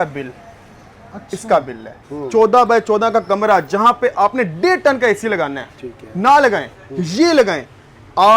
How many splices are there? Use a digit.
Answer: 1